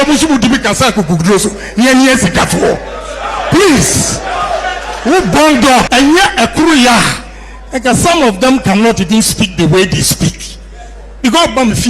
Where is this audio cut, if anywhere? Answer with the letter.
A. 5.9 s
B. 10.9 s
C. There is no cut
A